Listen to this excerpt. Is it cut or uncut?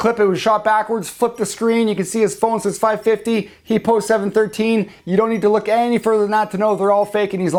uncut